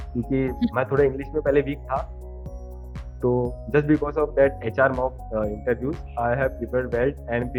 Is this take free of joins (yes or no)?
yes